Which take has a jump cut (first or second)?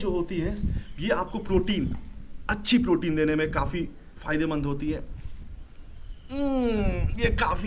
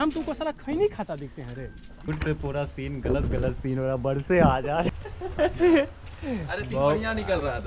second